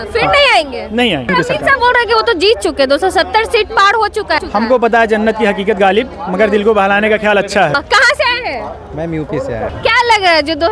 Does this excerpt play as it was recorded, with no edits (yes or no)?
no